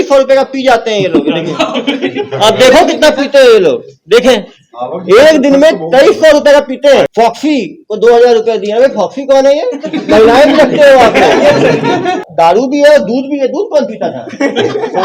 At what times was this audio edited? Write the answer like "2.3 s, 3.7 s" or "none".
7.1 s, 12.2 s